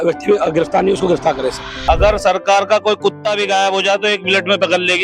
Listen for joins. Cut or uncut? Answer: cut